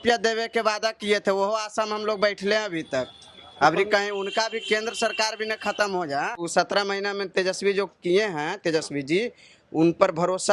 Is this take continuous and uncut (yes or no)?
no